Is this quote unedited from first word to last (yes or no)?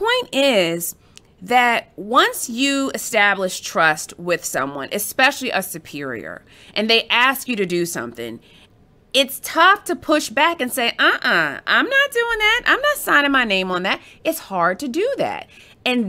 yes